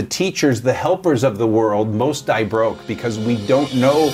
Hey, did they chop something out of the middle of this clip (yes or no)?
no